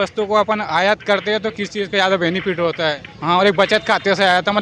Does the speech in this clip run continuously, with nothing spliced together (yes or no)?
no